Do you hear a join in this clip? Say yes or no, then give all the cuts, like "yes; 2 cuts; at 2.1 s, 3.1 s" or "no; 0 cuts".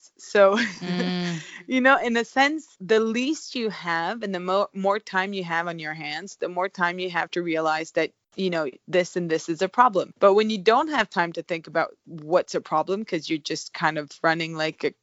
no; 0 cuts